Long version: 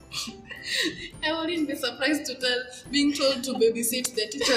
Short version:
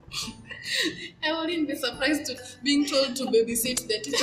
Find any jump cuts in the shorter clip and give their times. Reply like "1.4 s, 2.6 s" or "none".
2.4 s